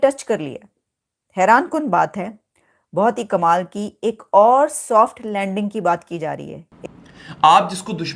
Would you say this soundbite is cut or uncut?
cut